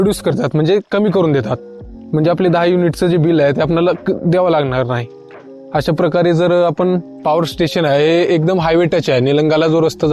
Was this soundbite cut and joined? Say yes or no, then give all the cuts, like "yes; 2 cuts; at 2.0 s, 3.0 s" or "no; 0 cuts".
yes; 1 cut; at 7.2 s